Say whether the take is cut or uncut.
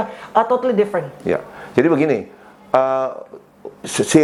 uncut